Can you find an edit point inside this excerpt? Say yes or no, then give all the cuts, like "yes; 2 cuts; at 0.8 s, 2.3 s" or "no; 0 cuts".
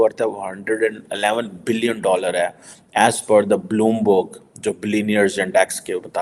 no; 0 cuts